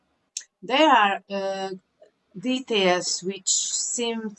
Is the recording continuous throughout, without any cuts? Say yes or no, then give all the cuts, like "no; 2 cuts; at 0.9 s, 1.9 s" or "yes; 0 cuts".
yes; 0 cuts